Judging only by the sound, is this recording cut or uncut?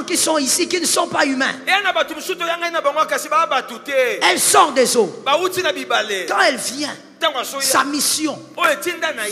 uncut